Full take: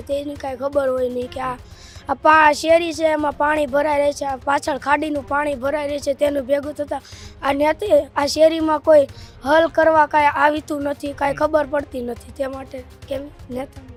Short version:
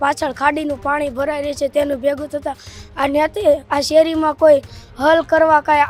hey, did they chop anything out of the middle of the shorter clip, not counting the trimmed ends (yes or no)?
no